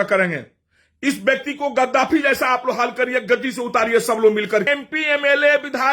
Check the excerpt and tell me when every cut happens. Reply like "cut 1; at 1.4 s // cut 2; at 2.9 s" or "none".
cut 1; at 4.7 s